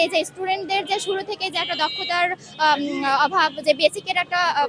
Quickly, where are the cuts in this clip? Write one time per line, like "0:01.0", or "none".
none